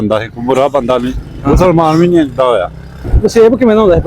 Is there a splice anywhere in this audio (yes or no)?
yes